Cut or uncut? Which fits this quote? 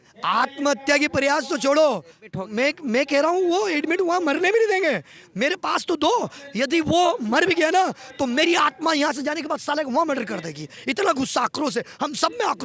uncut